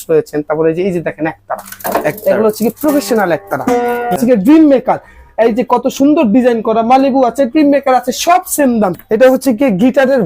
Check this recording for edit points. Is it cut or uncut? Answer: cut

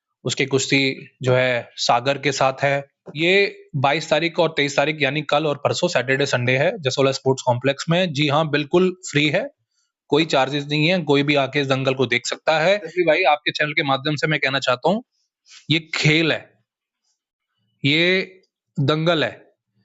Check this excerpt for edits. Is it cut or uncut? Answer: cut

